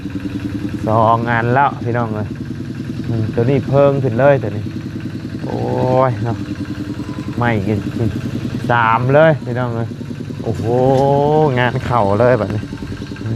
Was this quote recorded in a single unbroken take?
yes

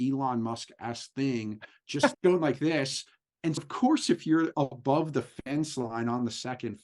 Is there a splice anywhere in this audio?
yes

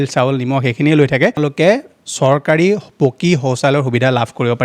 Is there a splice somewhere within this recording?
yes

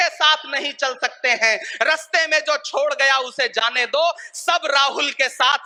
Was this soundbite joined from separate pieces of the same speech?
no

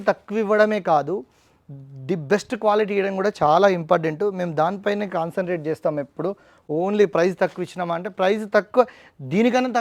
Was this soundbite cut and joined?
no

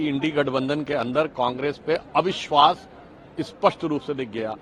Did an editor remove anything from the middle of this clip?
no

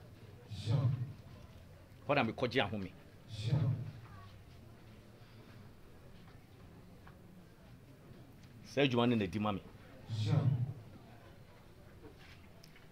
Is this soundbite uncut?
yes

